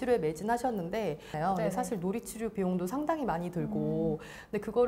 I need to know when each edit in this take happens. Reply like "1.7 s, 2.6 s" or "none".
1.3 s